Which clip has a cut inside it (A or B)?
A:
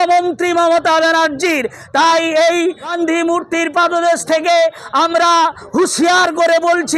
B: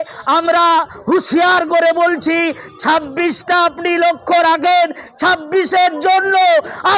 A